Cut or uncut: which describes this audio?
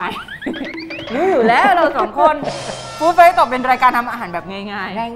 uncut